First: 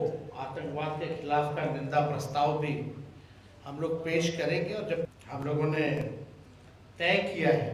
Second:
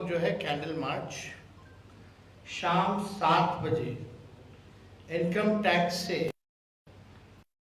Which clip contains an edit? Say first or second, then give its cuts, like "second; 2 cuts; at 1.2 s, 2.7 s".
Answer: first; 1 cut; at 5.1 s